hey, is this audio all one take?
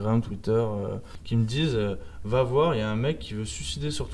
no; 1 cut; at 1.1 s

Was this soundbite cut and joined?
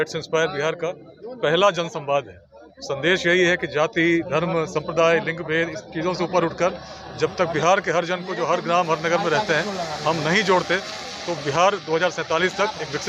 no; 0 cuts

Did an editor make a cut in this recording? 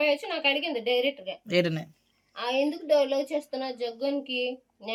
no; 0 cuts

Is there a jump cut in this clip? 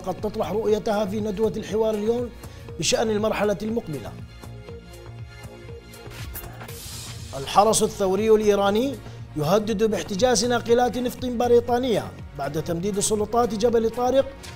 no; 0 cuts

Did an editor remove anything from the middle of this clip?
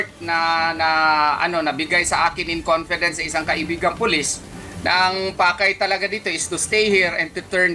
no; 0 cuts

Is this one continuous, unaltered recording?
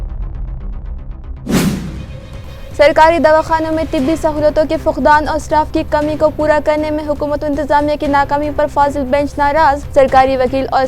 no; 1 cut; at 1.7 s

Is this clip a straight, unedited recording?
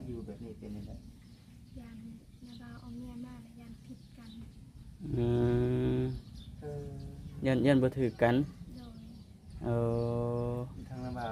yes; 0 cuts

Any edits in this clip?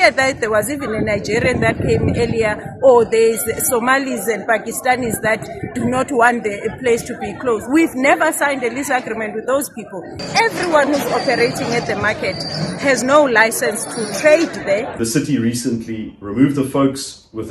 yes; 2 cuts; at 10.2 s, 15.0 s

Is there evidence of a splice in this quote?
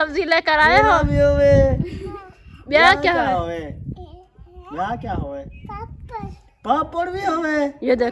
no; 0 cuts

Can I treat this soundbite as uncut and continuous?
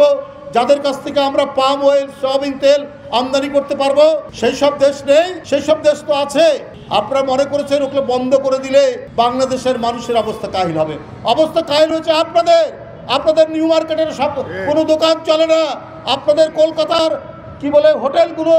no; 3 cuts; at 4.3 s, 5.4 s, 9.0 s

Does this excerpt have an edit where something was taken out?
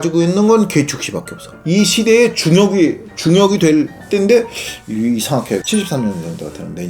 yes; 1 cut; at 1.6 s

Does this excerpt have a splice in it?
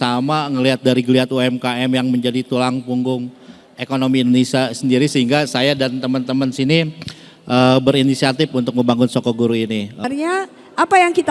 yes; 1 cut; at 10.1 s

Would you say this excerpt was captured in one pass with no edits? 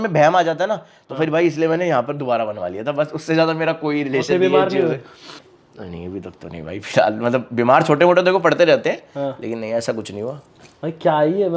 yes; 0 cuts

